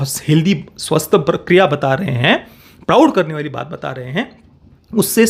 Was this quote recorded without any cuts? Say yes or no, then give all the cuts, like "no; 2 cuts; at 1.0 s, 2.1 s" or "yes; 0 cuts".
yes; 0 cuts